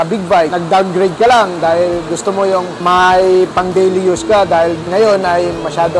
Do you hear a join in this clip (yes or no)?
no